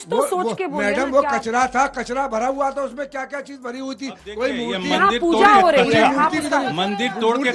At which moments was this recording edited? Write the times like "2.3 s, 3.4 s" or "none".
none